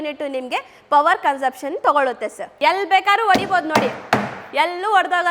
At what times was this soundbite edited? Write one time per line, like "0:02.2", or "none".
0:02.4